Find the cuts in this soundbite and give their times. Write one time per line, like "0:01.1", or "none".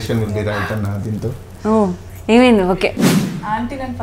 0:03.1